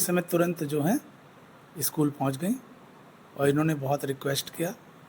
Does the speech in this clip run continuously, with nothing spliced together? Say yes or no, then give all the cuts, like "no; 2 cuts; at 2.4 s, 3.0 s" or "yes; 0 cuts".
yes; 0 cuts